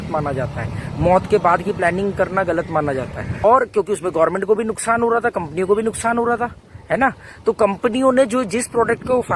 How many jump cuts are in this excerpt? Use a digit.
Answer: 1